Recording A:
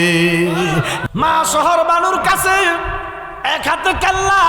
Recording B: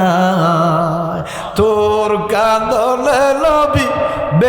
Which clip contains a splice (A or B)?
A